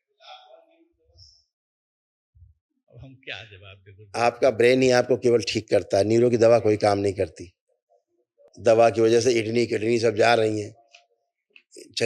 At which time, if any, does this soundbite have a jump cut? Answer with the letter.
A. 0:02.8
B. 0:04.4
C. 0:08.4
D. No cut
C